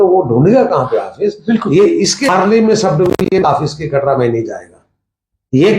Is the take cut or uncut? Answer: cut